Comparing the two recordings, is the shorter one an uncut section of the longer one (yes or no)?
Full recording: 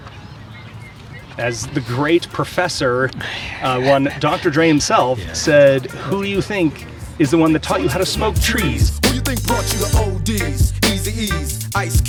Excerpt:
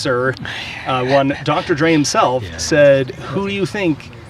yes